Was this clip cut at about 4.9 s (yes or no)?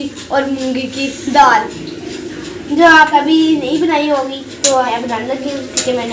yes